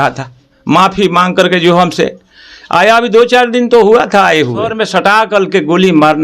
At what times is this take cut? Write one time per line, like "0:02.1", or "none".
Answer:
0:04.8

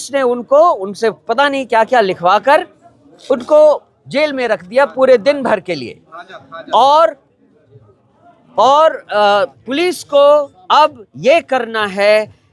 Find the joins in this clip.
none

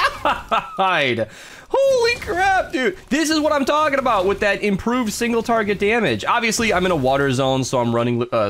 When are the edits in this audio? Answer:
none

